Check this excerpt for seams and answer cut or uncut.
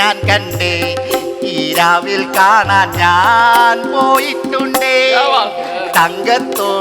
uncut